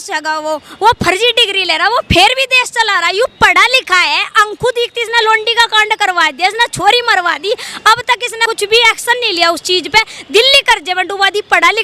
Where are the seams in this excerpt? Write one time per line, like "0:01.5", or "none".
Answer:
0:08.4

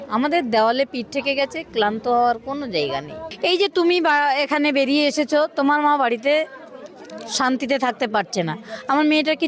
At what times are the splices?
0:03.2

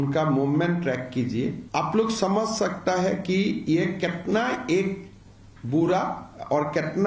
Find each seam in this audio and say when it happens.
0:01.6

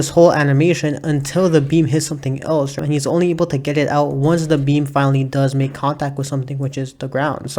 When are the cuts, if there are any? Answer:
0:02.8

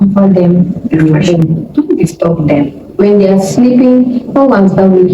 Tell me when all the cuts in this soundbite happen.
0:01.0

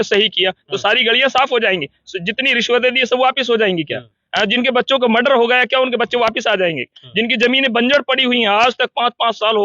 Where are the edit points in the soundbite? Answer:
none

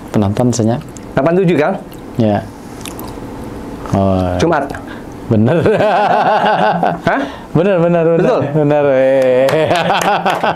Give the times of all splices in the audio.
none

